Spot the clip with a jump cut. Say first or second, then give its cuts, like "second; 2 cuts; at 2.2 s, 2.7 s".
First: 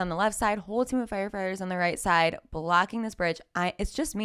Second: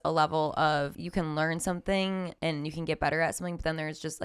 second; 2 cuts; at 1.0 s, 2.3 s